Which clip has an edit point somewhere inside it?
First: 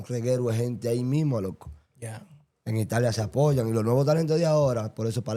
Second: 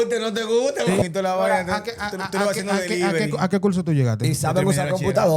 second; 1 cut; at 1.0 s

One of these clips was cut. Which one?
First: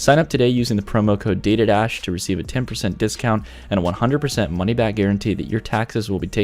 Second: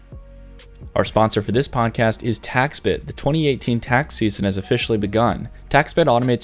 second; 1 cut; at 0.9 s

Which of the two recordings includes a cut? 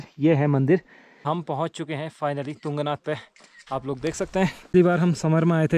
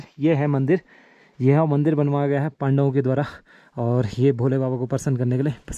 first; 2 cuts; at 1.2 s, 4.7 s

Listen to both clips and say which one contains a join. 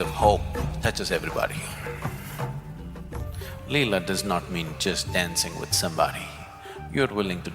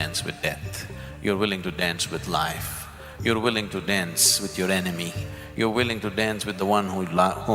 first; 1 cut; at 3.3 s

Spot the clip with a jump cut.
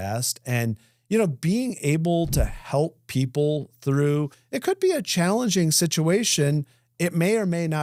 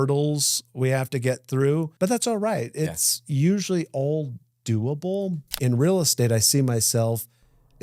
second; 2 cuts; at 1.9 s, 5.5 s

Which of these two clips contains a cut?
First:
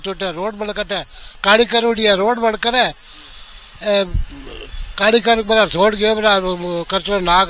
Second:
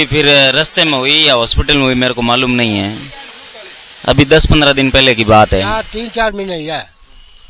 second; 1 cut; at 5.7 s

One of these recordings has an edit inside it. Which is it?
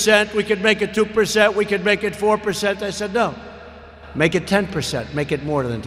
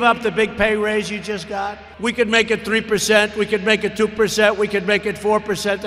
second; 1 cut; at 1.8 s

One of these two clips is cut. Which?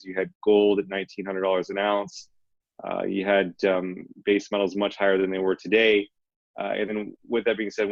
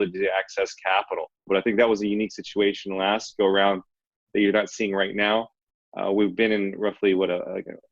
second; 1 cut; at 1.5 s

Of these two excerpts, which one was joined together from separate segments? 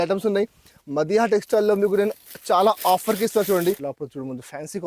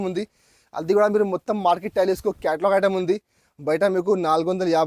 first; 1 cut; at 3.9 s

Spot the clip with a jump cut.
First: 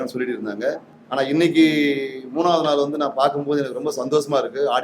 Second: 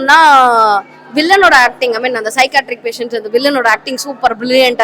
first; 1 cut; at 0.9 s

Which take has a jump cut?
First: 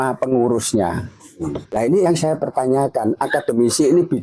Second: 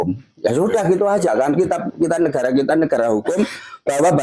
first; 1 cut; at 1.8 s

